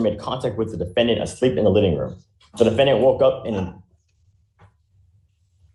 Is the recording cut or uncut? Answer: uncut